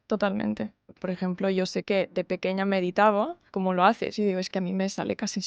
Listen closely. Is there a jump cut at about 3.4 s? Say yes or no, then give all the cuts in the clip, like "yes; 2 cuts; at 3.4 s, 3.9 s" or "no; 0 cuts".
yes; 2 cuts; at 1.0 s, 3.4 s